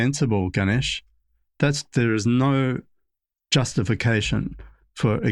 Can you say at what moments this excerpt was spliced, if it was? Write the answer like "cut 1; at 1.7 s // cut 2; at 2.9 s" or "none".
none